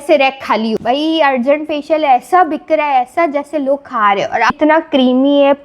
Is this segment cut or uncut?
cut